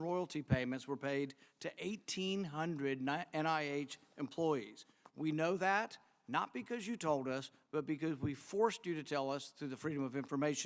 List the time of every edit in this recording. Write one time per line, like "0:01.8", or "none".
none

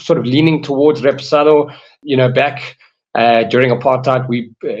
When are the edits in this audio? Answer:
0:01.9

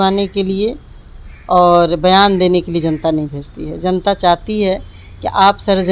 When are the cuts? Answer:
none

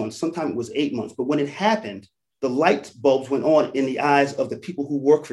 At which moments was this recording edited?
0:02.3

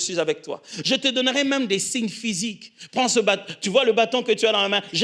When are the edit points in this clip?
none

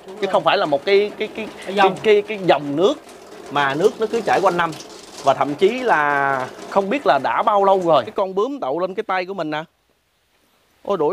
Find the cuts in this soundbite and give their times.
0:08.1

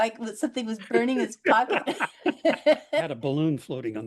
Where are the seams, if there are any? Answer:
0:03.1

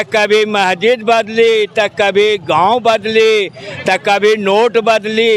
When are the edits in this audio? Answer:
none

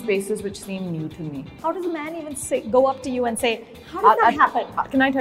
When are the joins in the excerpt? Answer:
0:01.6
0:03.7

